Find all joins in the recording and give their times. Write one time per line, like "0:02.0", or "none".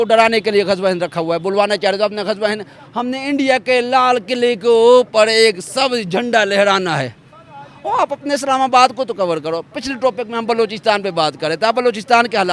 none